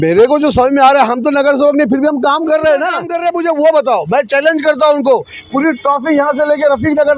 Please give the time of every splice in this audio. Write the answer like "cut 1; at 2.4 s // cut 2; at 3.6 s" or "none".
cut 1; at 3.1 s